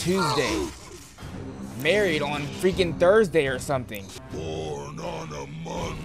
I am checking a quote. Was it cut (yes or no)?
yes